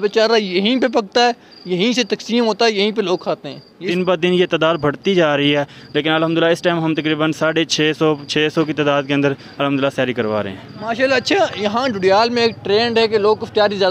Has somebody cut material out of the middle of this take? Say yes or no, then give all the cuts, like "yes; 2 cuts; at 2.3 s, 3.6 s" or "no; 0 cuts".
yes; 1 cut; at 3.9 s